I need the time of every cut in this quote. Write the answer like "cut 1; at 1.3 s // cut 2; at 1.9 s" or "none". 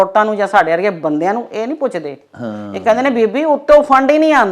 none